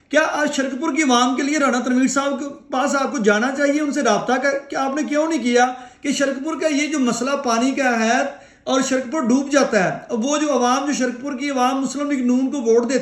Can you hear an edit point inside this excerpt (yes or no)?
no